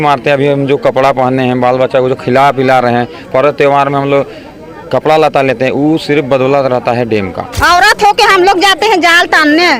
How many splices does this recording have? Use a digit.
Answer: 1